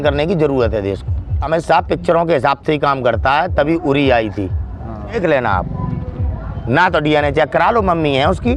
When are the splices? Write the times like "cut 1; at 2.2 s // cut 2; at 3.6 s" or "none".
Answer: cut 1; at 1.4 s // cut 2; at 5.2 s